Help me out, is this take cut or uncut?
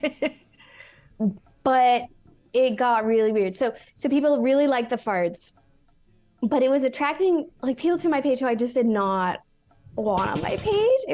cut